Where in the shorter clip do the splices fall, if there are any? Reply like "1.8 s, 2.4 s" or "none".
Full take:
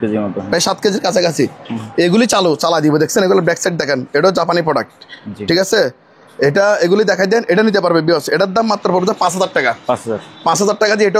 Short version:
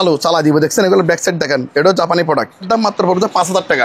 2.6 s